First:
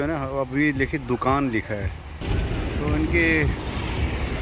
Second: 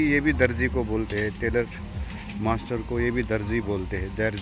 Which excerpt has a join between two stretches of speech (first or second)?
first